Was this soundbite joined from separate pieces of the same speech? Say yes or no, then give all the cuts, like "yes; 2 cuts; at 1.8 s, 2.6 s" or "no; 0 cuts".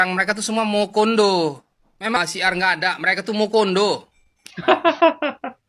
yes; 1 cut; at 2.2 s